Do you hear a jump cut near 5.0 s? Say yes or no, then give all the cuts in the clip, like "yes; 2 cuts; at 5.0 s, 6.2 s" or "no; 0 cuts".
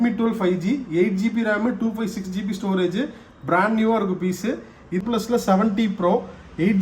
yes; 1 cut; at 5.0 s